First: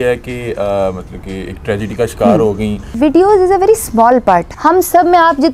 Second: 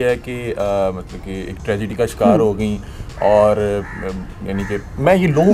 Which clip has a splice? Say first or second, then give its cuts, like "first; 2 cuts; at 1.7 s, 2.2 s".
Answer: first; 2 cuts; at 2.9 s, 4.5 s